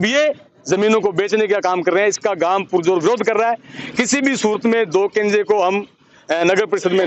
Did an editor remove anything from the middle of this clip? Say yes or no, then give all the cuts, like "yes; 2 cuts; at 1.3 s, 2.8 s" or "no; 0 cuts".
no; 0 cuts